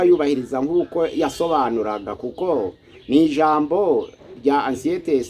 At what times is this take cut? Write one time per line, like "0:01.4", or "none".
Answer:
none